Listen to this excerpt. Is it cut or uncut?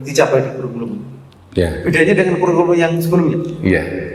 uncut